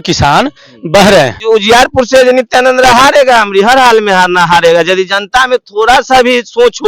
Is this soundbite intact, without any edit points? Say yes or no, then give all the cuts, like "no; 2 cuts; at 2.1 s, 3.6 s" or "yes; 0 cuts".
no; 1 cut; at 1.4 s